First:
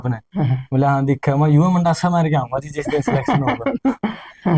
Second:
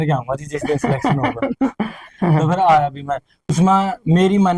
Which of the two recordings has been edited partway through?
second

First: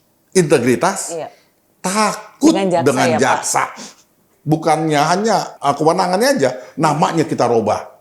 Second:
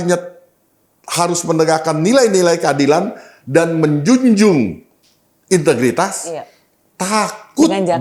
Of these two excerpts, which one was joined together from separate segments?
first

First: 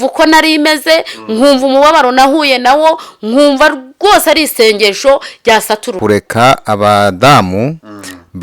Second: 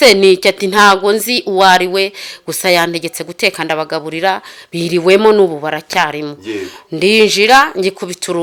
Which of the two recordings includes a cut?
first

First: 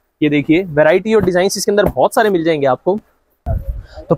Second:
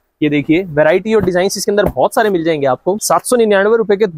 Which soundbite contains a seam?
second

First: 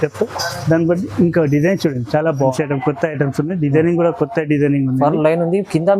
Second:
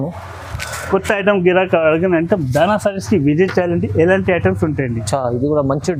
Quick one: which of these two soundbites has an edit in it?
first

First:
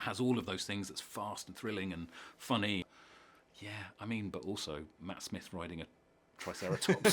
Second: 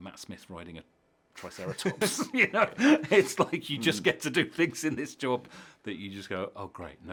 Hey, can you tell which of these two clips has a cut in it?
first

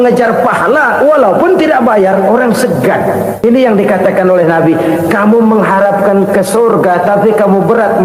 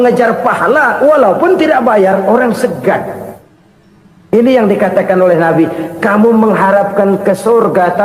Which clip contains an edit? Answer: first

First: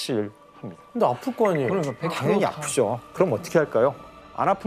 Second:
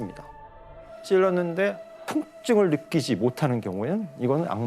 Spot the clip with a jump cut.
second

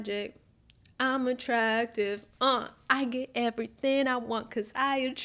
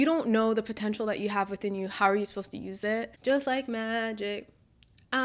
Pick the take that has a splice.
second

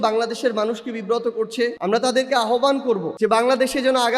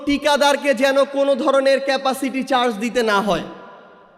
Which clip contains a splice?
first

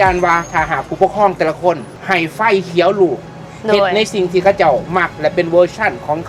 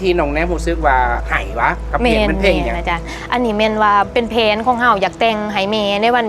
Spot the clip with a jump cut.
second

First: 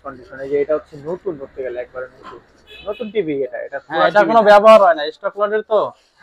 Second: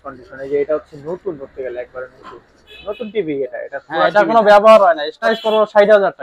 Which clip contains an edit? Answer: second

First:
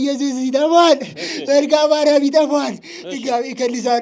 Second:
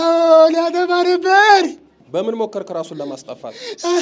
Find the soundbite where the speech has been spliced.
second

